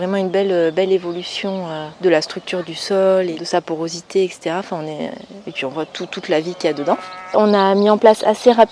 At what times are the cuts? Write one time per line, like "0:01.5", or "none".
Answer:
0:01.8
0:03.4
0:07.4